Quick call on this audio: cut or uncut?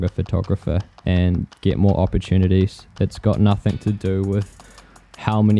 uncut